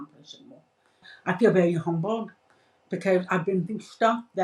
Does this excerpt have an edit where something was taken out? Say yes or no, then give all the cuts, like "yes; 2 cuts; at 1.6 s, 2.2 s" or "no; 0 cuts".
yes; 1 cut; at 1.1 s